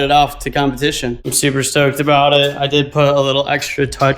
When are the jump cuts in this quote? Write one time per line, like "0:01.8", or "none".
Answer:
0:01.1